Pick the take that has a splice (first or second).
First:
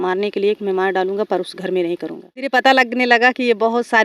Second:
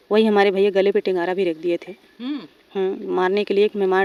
first